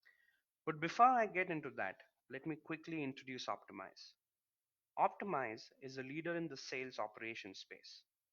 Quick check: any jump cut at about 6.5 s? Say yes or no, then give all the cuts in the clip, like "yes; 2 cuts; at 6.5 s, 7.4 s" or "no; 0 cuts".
no; 1 cut; at 2.7 s